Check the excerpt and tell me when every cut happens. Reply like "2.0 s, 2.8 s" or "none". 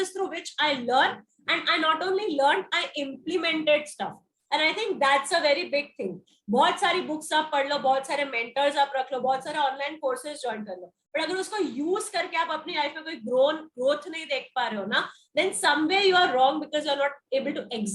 none